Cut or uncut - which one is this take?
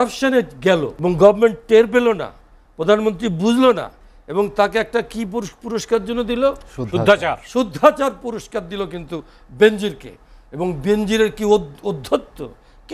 cut